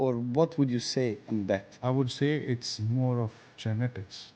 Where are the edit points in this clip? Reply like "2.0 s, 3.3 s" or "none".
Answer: 1.7 s, 3.5 s